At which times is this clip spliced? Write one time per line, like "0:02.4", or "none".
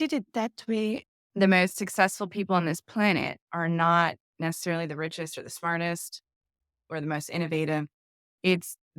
0:01.0